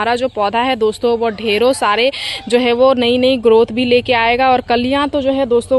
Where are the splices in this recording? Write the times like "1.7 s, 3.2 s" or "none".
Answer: none